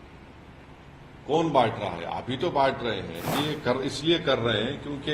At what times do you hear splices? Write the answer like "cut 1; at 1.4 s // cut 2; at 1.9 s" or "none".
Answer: cut 1; at 3.3 s